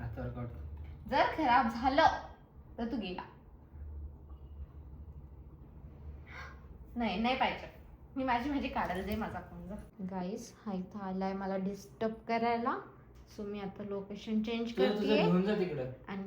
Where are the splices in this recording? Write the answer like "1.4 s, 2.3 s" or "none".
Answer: 9.9 s